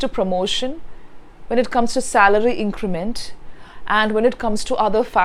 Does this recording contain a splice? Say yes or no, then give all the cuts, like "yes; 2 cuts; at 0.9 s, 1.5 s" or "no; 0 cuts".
no; 0 cuts